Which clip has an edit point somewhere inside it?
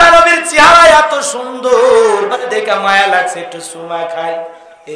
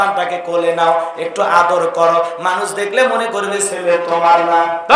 first; 1 cut; at 2.4 s

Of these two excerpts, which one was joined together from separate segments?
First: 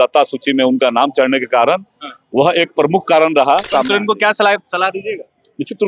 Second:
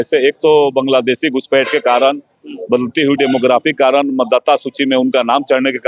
first; 1 cut; at 3.7 s

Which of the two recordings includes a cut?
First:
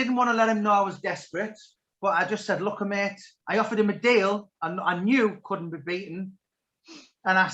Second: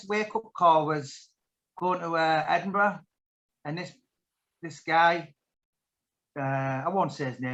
first; 1 cut; at 3.3 s

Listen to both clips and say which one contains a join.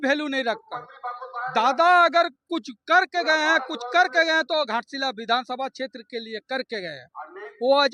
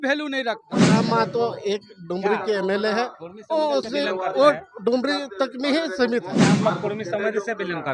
second; 2 cuts; at 0.9 s, 6.5 s

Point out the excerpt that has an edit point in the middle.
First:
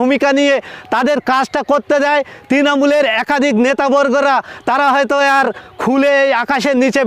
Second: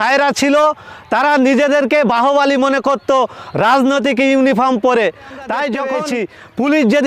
second; 1 cut; at 6.0 s

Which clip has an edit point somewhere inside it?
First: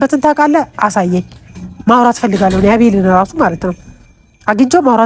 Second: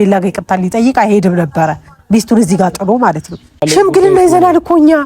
second; 1 cut; at 3.7 s

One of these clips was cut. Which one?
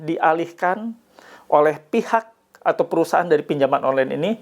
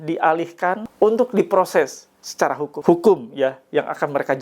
second; 2 cuts; at 0.8 s, 2.7 s

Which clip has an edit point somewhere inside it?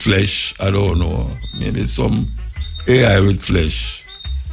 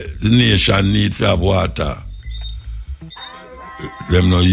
second; 1 cut; at 3.1 s

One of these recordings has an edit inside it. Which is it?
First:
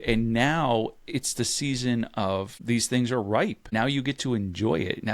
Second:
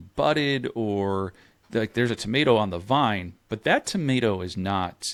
first; 2 cuts; at 2.5 s, 3.7 s

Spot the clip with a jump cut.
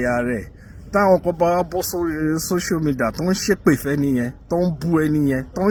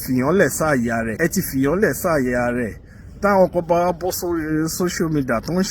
second; 1 cut; at 1.1 s

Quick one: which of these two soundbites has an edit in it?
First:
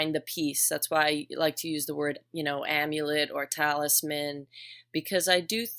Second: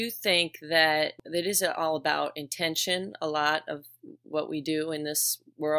second; 1 cut; at 1.2 s

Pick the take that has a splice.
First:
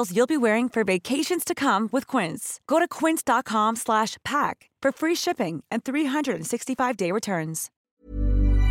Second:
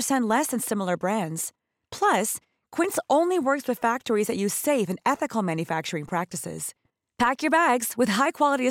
first; 1 cut; at 7.8 s

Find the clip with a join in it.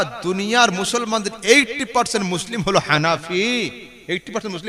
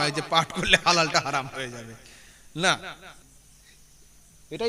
second; 1 cut; at 3.2 s

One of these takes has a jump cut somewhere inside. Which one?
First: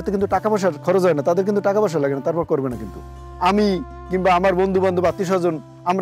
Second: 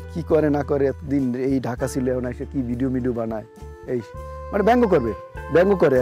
first; 1 cut; at 3.2 s

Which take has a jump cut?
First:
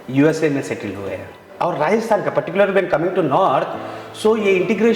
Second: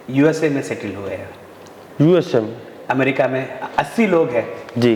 first; 1 cut; at 1.4 s

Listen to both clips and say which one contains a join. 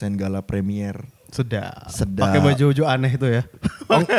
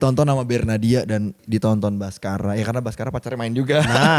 second; 1 cut; at 1.4 s

